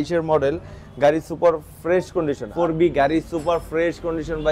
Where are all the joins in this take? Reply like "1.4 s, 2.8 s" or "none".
2.4 s